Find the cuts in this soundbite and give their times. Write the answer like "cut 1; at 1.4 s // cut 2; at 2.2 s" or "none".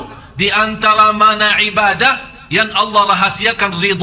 none

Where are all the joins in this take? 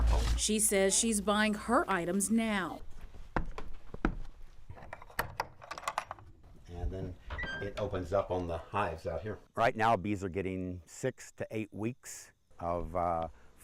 cut 1; at 2.7 s

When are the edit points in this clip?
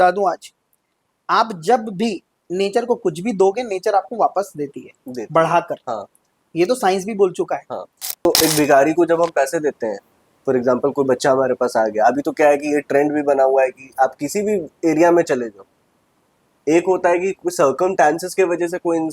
cut 1; at 8.0 s

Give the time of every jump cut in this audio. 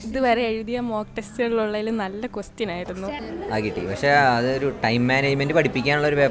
cut 1; at 3.2 s

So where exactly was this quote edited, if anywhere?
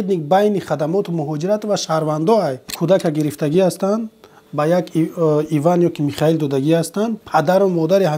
cut 1; at 2.7 s

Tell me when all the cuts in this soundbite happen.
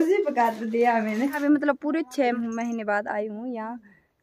cut 1; at 1.4 s // cut 2; at 2.4 s

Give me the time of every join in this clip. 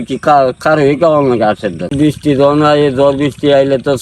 cut 1; at 1.9 s

